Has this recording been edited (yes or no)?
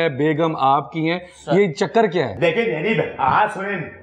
no